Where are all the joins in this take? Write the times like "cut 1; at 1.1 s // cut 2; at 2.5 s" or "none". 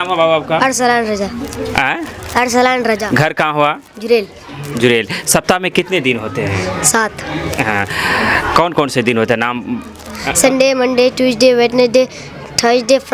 none